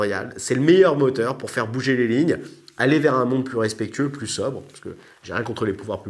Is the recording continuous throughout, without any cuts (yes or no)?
yes